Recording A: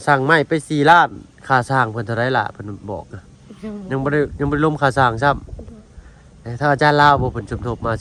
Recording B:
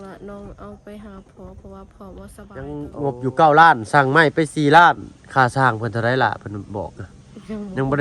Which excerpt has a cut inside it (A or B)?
B